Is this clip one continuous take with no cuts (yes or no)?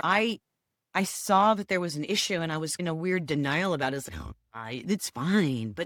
yes